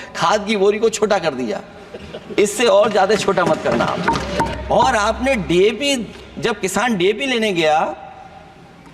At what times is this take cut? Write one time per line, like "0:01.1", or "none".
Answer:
0:04.6